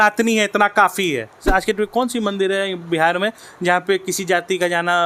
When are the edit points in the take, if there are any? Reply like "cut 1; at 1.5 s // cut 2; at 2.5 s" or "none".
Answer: cut 1; at 1.5 s